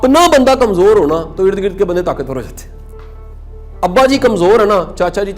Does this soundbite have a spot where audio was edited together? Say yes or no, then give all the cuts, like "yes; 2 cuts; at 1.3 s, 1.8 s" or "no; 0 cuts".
no; 0 cuts